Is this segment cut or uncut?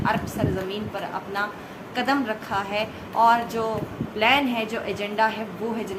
uncut